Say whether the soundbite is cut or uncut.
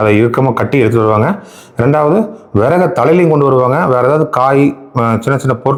uncut